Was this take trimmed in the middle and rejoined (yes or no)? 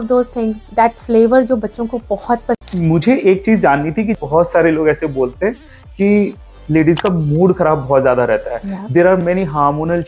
yes